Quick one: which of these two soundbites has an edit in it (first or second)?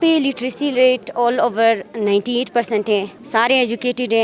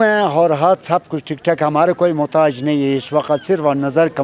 first